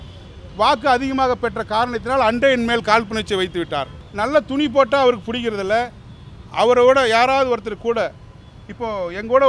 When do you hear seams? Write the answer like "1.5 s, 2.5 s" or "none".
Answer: 4.0 s